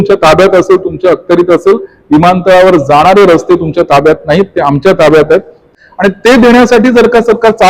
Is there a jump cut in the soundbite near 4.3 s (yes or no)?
no